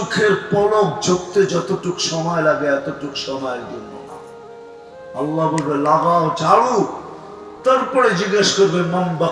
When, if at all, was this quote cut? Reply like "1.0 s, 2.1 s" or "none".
none